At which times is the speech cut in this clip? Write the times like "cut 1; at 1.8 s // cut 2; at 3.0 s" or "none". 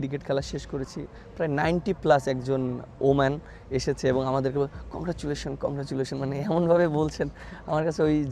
none